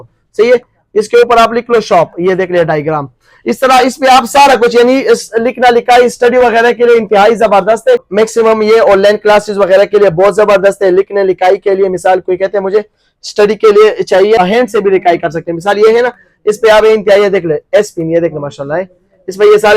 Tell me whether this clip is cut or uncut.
cut